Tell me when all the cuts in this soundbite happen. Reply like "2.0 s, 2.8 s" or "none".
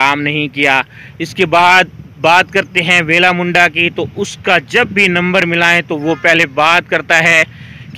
none